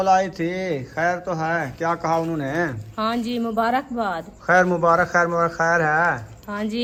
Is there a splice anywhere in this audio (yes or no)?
no